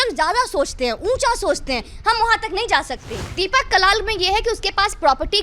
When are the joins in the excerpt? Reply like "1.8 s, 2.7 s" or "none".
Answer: 3.2 s